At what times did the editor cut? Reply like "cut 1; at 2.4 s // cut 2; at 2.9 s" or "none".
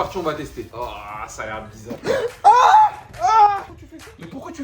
cut 1; at 2.0 s